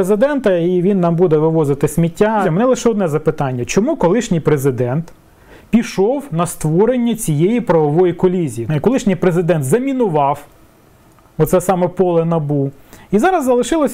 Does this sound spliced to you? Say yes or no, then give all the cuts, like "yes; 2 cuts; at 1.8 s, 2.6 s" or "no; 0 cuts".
yes; 2 cuts; at 2.4 s, 8.6 s